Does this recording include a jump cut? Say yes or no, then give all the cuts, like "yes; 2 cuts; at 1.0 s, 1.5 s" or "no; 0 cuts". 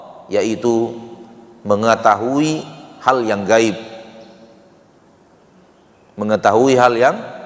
no; 0 cuts